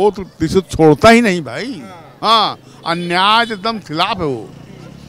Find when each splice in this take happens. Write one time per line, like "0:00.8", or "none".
none